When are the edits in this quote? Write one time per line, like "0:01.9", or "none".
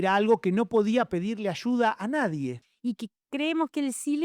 0:02.7